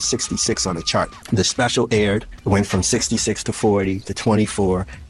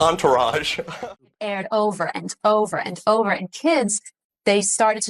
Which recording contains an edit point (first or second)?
second